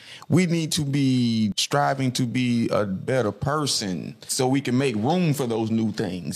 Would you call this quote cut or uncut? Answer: cut